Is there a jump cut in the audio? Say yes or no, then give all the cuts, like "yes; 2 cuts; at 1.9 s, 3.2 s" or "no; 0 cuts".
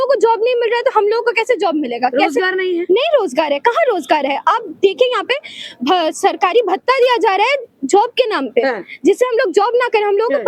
no; 0 cuts